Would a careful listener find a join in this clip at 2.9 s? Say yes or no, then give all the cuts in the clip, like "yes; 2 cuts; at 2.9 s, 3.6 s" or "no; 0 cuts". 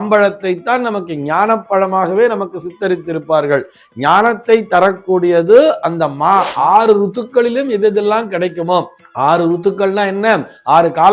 no; 1 cut; at 6.5 s